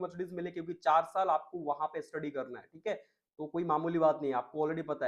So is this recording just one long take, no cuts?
yes; 0 cuts

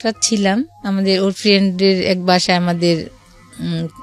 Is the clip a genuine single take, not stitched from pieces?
yes; 0 cuts

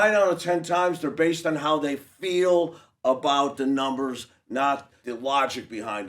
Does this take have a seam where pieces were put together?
yes; 1 cut; at 5.0 s

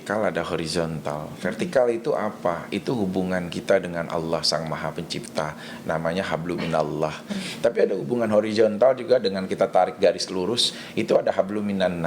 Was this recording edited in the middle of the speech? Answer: yes; 1 cut; at 7.4 s

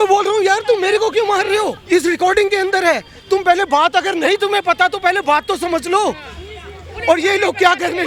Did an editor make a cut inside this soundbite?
no; 0 cuts

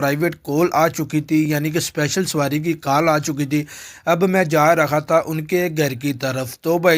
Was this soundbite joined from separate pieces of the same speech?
no; 0 cuts

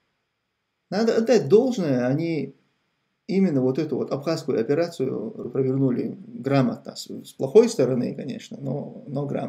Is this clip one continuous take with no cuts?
no; 1 cut; at 5.4 s

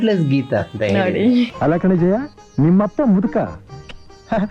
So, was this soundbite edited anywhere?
yes; 1 cut; at 1.5 s

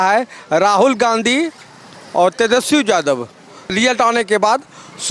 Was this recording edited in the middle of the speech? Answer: no; 0 cuts

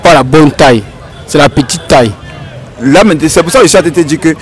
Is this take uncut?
yes; 0 cuts

